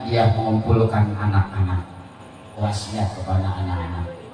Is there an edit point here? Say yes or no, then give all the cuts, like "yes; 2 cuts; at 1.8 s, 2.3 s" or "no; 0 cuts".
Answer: yes; 1 cut; at 2.6 s